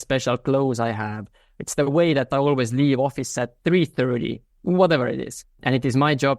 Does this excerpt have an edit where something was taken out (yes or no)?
yes